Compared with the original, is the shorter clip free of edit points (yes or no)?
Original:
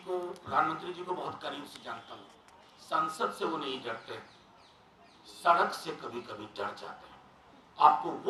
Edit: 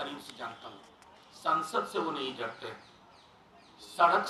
yes